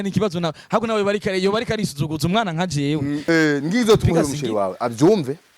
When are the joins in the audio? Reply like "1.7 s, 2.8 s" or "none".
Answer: 3.2 s